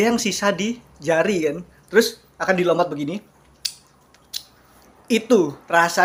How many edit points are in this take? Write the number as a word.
zero